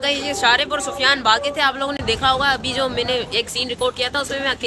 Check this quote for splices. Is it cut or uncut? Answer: uncut